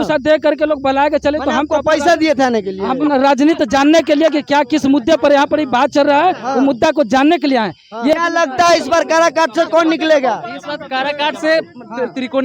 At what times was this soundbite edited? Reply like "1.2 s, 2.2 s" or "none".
8.1 s